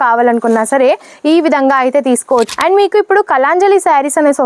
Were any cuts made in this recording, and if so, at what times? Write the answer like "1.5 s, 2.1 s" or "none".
2.5 s